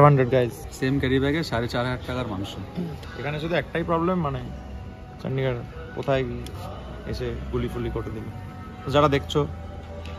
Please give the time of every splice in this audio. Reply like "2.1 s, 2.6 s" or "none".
3.1 s